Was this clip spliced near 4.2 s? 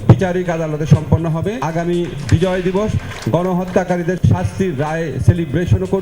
yes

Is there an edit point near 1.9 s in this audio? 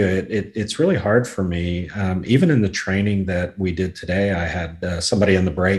no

